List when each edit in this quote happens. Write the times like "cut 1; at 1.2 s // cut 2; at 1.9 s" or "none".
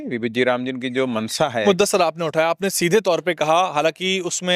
cut 1; at 1.6 s

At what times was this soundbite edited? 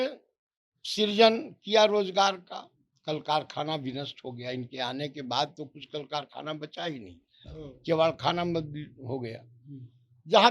none

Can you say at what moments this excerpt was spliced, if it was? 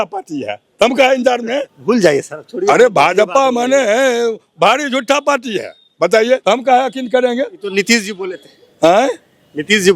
cut 1; at 1.7 s // cut 2; at 6.4 s

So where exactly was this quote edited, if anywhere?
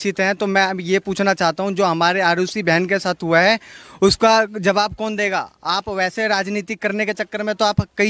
none

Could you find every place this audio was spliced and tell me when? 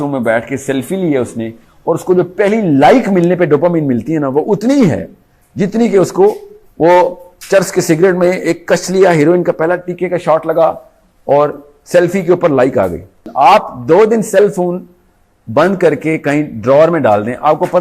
cut 1; at 13.2 s

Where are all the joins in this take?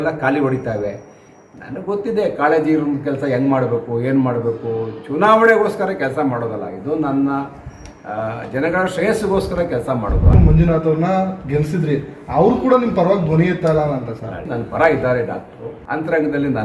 cut 1; at 10.3 s // cut 2; at 14.5 s // cut 3; at 15.7 s

